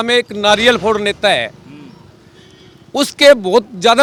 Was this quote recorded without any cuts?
yes; 0 cuts

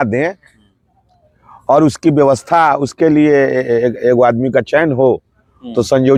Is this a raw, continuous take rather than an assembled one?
yes; 0 cuts

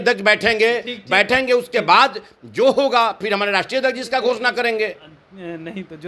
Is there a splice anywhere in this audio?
no; 0 cuts

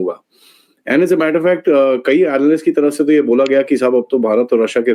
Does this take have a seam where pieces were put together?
no; 0 cuts

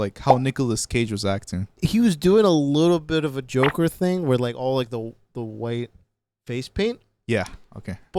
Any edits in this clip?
yes; 1 cut; at 1.7 s

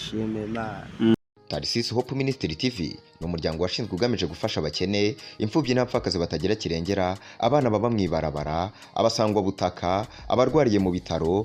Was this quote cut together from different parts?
yes; 1 cut; at 1.1 s

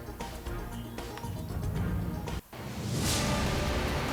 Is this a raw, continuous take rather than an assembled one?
yes; 0 cuts

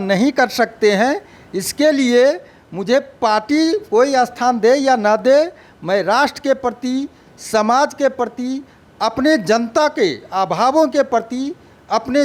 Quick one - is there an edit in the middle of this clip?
no; 0 cuts

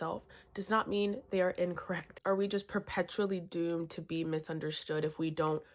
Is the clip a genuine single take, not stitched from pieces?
no; 1 cut; at 2.1 s

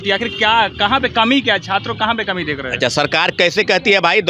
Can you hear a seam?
no; 0 cuts

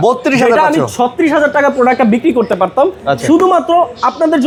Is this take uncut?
yes; 0 cuts

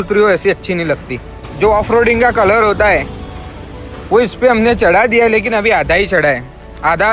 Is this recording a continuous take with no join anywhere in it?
no; 1 cut; at 1.4 s

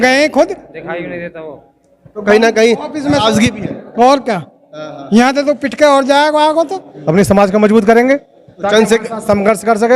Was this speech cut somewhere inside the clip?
yes; 1 cut; at 6.9 s

